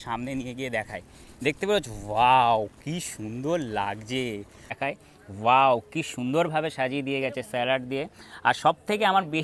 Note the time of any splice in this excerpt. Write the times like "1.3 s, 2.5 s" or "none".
4.8 s